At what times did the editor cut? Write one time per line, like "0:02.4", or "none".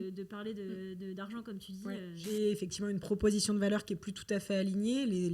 0:02.2